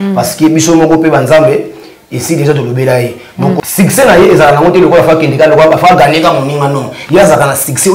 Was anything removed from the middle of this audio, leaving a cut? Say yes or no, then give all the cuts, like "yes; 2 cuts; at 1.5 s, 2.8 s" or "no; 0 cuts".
yes; 1 cut; at 3.6 s